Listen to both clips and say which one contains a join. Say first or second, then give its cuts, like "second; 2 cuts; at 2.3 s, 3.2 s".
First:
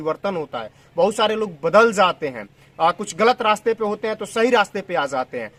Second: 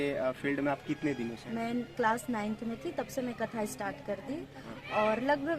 second; 1 cut; at 1.4 s